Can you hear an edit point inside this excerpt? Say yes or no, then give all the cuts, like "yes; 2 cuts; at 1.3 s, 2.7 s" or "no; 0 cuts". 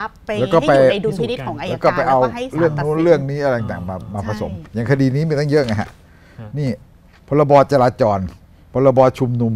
no; 0 cuts